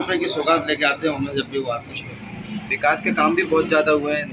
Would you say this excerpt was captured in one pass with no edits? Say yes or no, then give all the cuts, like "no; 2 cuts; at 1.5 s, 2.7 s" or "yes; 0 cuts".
no; 1 cut; at 2.3 s